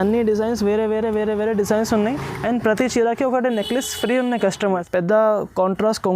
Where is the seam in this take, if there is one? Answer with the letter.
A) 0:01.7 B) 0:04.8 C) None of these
B